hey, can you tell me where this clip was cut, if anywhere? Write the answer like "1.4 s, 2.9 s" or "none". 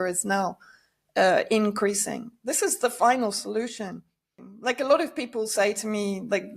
4.4 s